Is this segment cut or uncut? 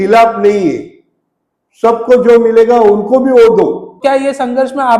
cut